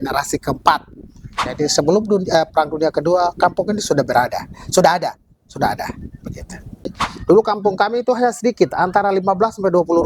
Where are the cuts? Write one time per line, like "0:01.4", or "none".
0:01.4
0:06.9